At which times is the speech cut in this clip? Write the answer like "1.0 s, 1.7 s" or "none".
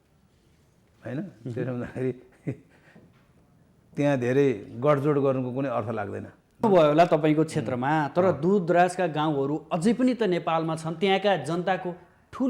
6.6 s